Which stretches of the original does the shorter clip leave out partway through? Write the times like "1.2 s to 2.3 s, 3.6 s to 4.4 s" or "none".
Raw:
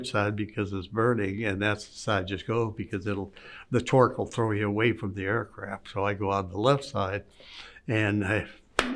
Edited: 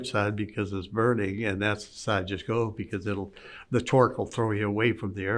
none